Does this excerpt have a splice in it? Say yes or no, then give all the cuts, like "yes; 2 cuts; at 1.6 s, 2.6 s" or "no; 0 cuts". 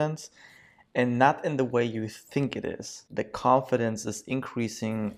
yes; 1 cut; at 3.0 s